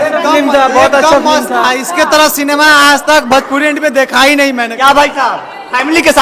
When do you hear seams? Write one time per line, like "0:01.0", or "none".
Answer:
none